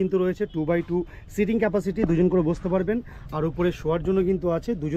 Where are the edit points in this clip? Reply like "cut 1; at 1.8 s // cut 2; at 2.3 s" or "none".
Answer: none